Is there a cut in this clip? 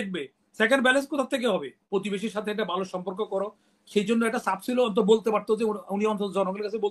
yes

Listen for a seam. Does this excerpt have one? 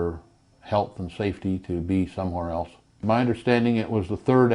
yes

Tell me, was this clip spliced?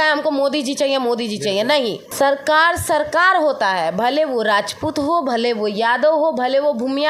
yes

